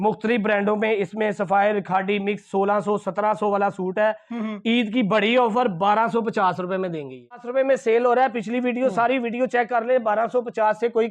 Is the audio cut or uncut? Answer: cut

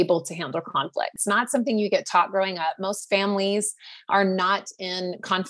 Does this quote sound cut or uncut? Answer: cut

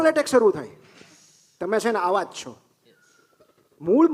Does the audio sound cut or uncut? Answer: uncut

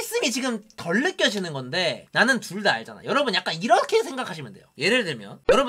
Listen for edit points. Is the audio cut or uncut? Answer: uncut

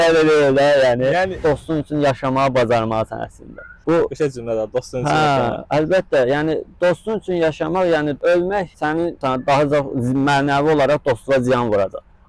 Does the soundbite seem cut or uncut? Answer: cut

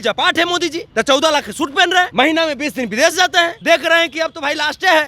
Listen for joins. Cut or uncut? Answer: cut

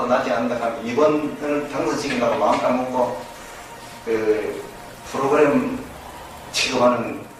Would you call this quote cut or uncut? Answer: uncut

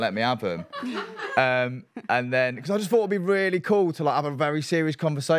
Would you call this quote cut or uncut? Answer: uncut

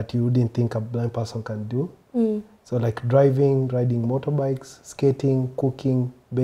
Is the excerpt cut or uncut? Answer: uncut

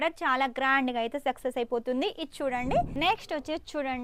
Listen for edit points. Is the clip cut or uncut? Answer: cut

